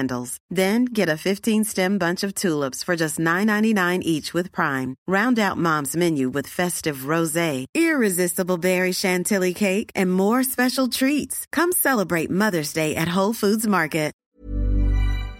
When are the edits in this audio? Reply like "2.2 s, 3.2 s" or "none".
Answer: 14.2 s